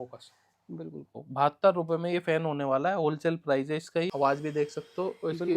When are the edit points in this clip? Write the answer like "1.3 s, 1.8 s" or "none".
1.2 s, 4.1 s